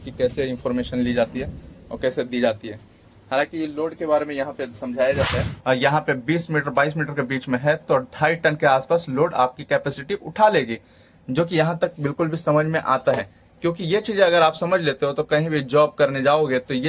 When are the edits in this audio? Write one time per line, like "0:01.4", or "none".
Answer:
0:05.4